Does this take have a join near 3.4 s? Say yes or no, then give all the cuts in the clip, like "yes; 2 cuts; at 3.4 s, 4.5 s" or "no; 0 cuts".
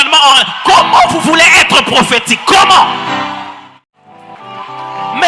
yes; 1 cut; at 3.4 s